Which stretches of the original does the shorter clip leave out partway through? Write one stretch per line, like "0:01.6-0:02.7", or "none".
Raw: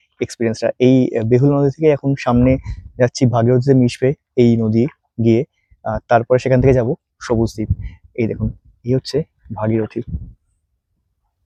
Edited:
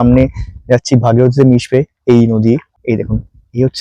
0:05.0-0:08.0